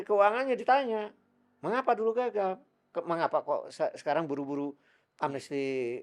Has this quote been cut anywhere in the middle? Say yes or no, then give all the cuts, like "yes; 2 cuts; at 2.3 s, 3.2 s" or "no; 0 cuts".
no; 0 cuts